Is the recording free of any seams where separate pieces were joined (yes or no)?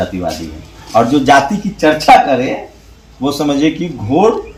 yes